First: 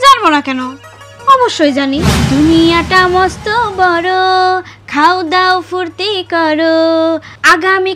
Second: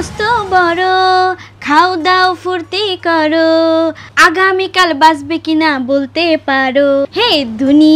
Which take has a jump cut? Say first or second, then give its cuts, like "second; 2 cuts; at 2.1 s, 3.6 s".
first; 1 cut; at 2.1 s